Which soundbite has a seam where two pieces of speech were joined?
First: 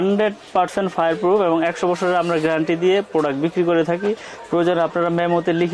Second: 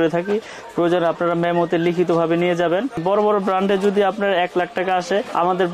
second; 1 cut; at 3.0 s

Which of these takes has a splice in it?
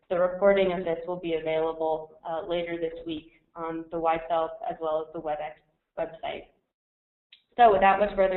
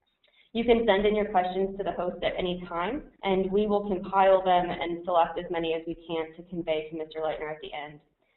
second; 1 cut; at 1.3 s

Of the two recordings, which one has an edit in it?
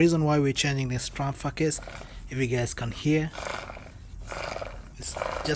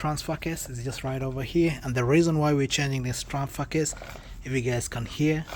first; 1 cut; at 4.7 s

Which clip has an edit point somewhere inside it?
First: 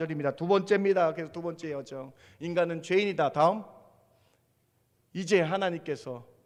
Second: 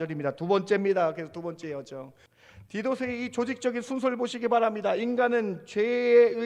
second; 1 cut; at 2.2 s

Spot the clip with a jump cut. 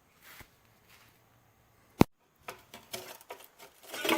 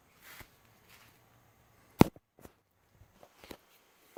first; 1 cut; at 2.0 s

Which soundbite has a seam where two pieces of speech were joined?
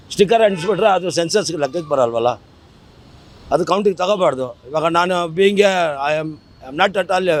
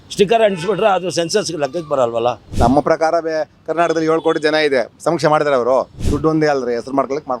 second; 2 cuts; at 2.5 s, 6.0 s

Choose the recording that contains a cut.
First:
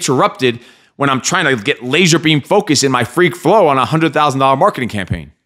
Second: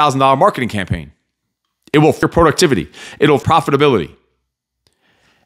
second; 2 cuts; at 2.2 s, 3.4 s

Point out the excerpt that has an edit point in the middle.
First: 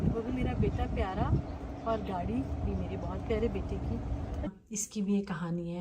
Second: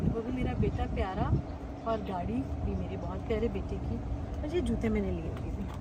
first; 1 cut; at 4.5 s

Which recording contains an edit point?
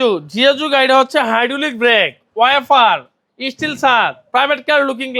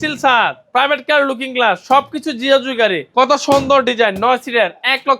second; 1 cut; at 3.0 s

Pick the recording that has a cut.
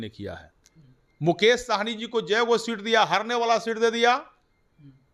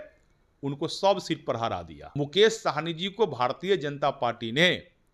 second; 1 cut; at 2.1 s

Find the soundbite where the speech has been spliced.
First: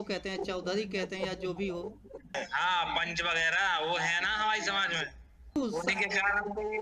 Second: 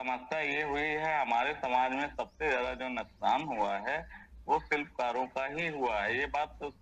first; 2 cuts; at 2.3 s, 5.6 s

